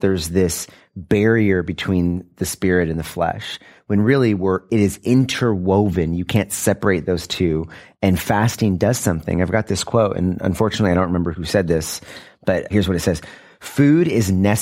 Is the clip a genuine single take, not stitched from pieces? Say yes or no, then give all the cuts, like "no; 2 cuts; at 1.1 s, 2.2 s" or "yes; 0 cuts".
no; 3 cuts; at 4.7 s, 11.3 s, 12.7 s